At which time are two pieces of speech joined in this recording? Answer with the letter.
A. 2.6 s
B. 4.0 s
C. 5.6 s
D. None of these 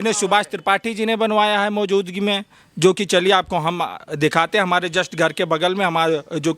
D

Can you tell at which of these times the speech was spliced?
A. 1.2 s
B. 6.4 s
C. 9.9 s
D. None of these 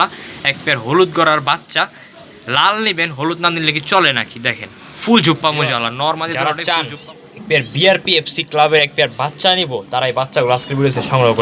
B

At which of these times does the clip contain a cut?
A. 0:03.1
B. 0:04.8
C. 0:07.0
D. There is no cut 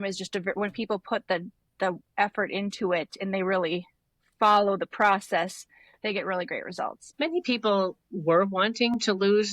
C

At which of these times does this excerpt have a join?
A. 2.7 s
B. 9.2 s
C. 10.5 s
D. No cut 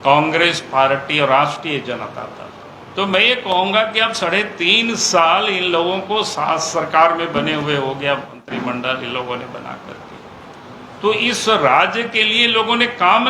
A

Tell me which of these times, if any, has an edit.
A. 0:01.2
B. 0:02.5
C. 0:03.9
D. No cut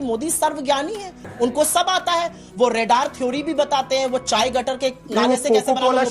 A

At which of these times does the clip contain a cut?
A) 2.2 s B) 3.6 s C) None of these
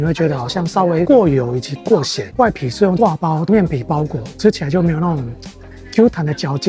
A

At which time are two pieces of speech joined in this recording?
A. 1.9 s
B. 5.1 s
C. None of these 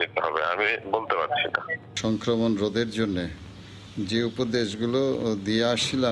A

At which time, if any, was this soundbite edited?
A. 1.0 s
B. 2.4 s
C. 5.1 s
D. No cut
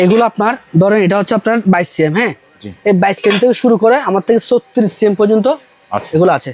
D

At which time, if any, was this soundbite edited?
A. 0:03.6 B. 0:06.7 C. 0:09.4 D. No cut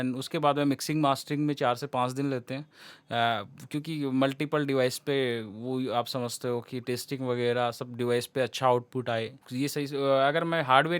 C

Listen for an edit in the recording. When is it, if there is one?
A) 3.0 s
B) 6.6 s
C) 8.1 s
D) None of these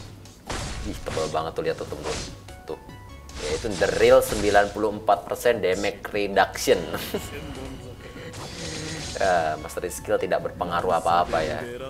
D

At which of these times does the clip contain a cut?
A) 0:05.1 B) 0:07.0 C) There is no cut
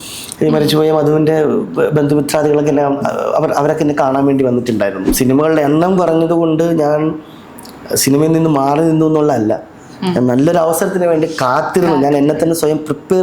A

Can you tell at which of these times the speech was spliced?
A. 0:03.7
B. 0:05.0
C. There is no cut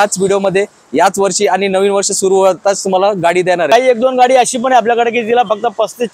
A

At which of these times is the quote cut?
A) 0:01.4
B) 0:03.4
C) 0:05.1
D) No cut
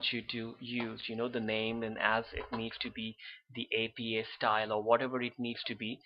B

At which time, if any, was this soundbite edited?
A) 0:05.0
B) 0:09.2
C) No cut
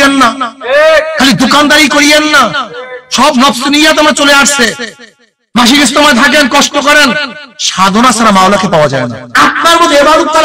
B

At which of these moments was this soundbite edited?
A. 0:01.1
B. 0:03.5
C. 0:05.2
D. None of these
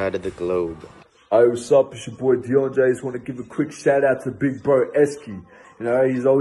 A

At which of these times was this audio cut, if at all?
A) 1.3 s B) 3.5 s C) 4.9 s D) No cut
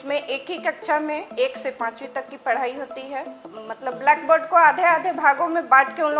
B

